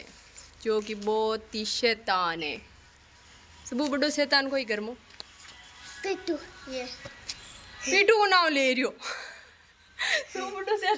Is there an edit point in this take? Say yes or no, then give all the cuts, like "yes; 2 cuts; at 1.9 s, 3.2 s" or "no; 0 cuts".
no; 0 cuts